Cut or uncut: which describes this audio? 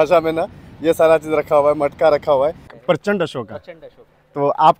cut